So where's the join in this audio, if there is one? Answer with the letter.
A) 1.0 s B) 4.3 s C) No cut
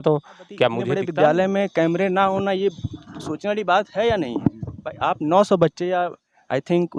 A